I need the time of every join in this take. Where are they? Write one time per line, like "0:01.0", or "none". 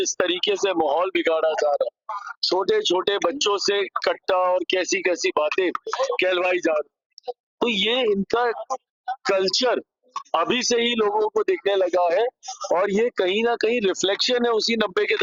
none